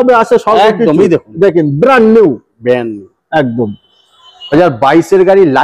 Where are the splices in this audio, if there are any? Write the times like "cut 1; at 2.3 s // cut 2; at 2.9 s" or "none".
cut 1; at 4.5 s